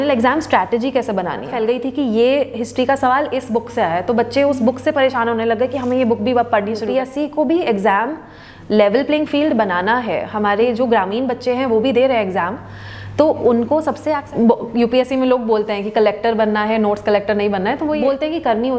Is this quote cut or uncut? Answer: cut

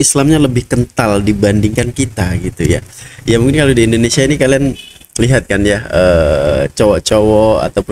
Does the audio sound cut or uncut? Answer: uncut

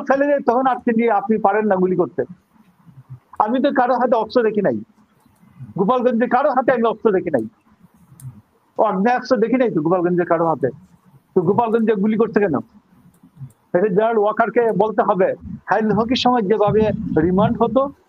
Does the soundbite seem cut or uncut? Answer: cut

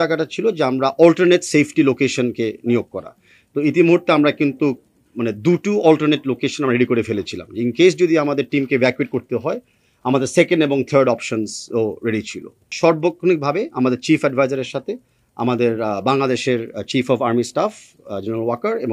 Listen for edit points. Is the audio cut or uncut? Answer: cut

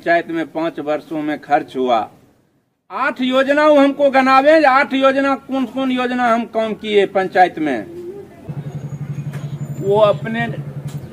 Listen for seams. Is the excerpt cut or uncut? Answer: cut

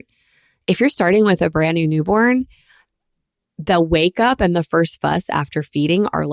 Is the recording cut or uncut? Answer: uncut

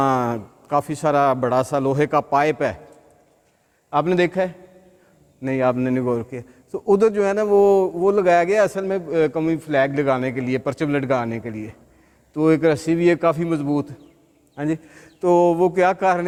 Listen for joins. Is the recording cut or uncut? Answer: uncut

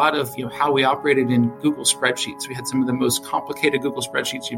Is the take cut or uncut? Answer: uncut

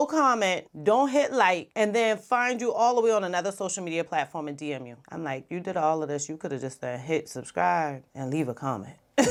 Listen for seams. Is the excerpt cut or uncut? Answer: uncut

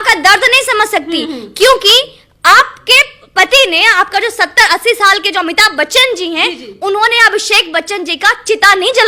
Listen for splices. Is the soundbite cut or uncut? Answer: uncut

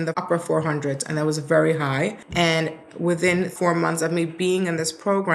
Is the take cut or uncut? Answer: cut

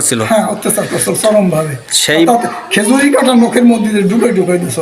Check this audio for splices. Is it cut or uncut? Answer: uncut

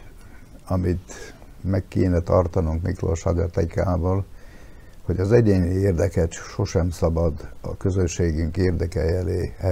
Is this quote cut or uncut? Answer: uncut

